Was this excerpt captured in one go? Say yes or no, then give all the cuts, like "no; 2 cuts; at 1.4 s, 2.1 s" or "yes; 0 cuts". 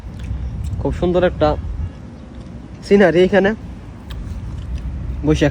yes; 0 cuts